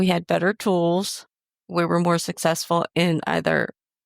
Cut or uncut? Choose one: cut